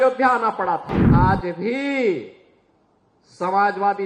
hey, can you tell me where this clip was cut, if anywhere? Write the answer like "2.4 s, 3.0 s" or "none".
1.0 s

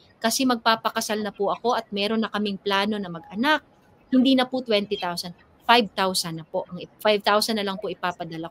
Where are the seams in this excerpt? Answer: none

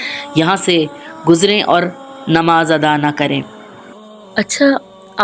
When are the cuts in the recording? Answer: none

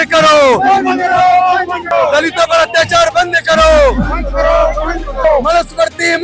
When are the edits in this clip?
1.8 s, 5.2 s

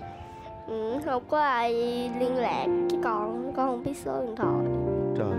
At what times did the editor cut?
none

